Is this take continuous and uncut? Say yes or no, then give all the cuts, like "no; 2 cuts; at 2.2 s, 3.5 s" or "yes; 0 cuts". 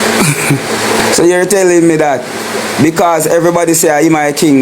no; 1 cut; at 1.0 s